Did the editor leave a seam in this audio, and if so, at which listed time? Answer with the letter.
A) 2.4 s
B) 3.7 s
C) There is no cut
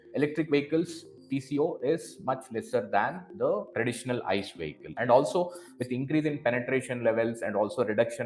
C